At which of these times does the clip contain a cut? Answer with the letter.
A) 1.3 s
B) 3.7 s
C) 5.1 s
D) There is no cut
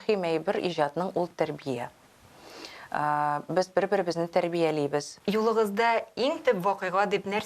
C